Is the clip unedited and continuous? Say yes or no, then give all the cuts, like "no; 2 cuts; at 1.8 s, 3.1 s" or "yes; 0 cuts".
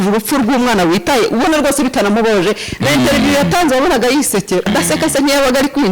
no; 1 cut; at 4.7 s